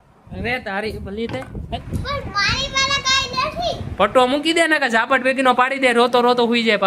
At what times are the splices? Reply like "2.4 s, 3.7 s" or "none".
1.8 s